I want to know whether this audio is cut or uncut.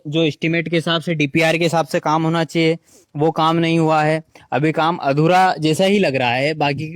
uncut